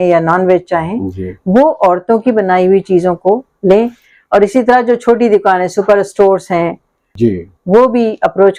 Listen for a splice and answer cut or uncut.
cut